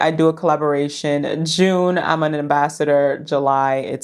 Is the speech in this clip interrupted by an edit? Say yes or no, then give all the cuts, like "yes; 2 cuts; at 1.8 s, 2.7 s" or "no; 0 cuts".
no; 0 cuts